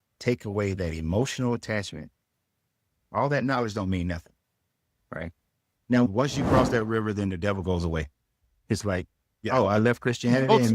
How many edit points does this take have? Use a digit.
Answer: 1